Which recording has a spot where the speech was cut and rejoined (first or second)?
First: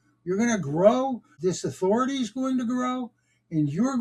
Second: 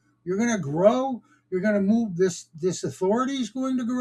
first